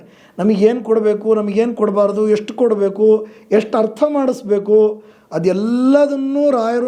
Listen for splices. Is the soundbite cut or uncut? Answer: uncut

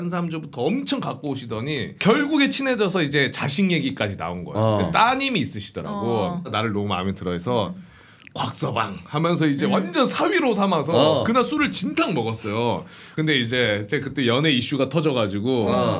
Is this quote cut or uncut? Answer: cut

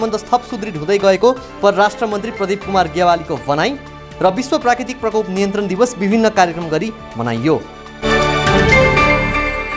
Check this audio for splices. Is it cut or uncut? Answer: cut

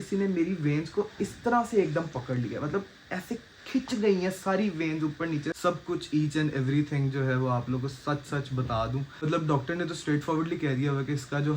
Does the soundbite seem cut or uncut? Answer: cut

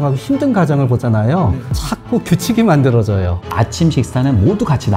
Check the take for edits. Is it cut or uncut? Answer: cut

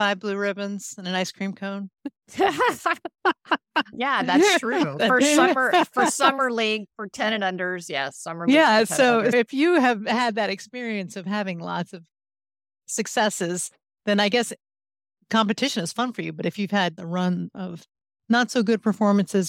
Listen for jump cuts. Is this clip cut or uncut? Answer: cut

